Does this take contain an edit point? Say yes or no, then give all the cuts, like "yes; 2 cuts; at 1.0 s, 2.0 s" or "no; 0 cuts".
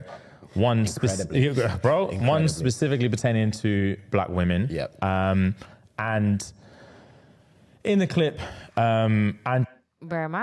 no; 0 cuts